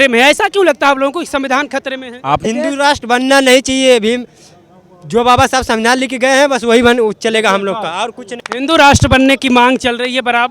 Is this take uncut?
no; 2 cuts; at 2.4 s, 8.3 s

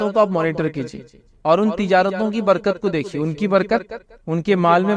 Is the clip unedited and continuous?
yes; 0 cuts

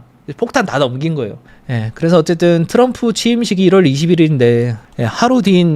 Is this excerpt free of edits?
no; 1 cut; at 1.4 s

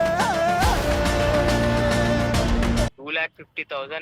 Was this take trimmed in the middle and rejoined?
yes; 1 cut; at 3.0 s

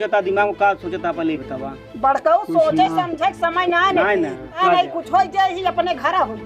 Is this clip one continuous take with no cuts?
no; 2 cuts; at 1.9 s, 4.6 s

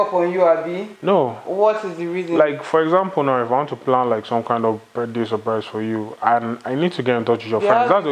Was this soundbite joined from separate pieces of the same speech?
no; 0 cuts

